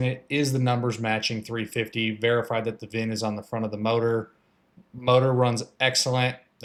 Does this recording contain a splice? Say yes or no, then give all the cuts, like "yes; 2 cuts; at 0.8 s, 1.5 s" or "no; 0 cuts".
no; 0 cuts